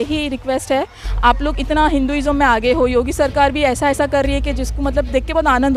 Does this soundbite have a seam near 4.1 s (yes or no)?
no